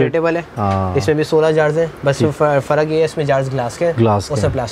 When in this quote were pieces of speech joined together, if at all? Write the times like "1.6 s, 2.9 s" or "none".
none